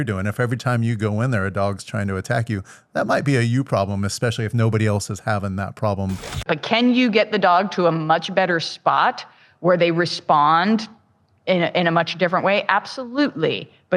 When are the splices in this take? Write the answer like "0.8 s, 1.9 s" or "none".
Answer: 6.4 s

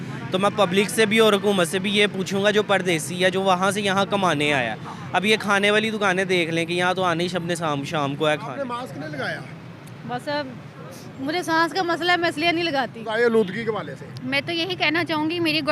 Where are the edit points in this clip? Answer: 8.7 s, 13.0 s

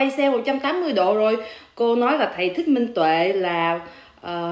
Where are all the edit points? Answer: none

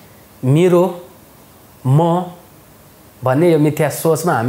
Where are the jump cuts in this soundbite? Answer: none

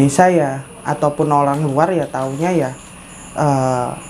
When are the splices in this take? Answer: none

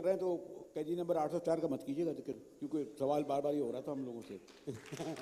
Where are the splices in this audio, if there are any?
none

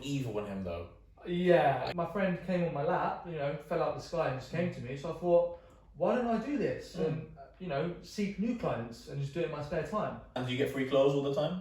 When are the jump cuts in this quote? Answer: 1.9 s, 10.4 s

